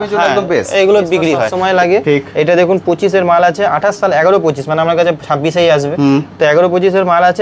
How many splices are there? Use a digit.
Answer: 1